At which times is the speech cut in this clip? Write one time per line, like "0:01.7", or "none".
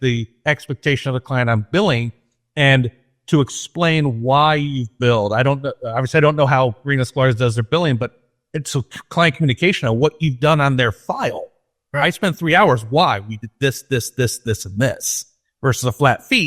none